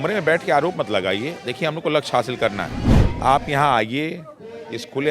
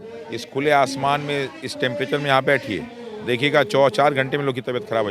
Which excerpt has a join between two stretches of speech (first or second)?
first